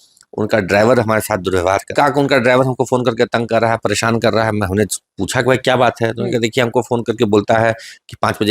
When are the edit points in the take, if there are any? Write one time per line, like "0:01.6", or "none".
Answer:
0:01.9